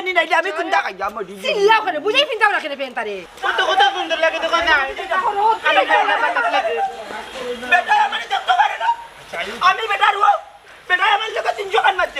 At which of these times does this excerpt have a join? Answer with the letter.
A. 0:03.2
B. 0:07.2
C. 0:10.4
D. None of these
A